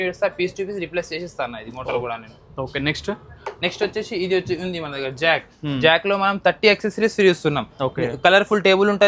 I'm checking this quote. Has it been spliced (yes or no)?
no